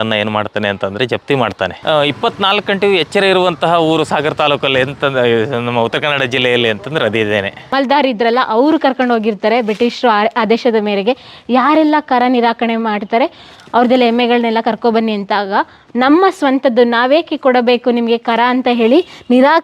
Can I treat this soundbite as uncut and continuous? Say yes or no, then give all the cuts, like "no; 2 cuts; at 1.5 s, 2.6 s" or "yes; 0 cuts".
no; 2 cuts; at 1.8 s, 7.7 s